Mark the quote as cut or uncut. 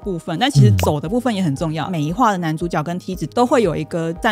cut